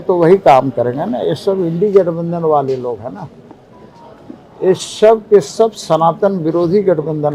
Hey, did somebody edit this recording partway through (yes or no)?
no